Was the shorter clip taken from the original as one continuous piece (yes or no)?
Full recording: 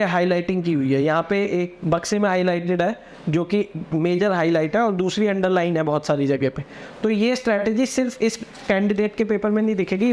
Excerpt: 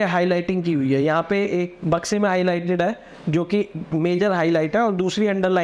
yes